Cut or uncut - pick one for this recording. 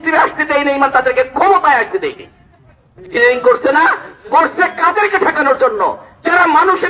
cut